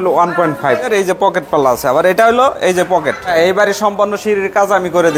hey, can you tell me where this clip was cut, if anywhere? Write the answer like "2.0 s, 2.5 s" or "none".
0.8 s, 3.3 s